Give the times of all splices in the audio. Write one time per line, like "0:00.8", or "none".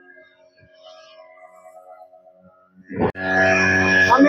0:03.1